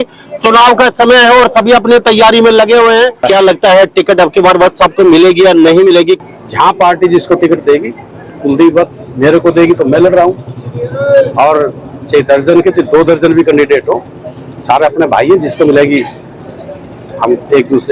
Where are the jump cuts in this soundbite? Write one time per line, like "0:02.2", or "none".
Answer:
0:03.2
0:06.2